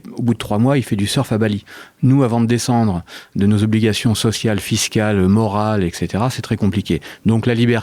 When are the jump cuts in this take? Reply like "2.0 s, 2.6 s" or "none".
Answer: none